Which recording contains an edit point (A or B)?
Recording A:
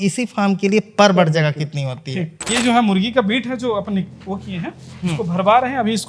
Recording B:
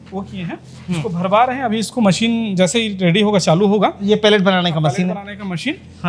A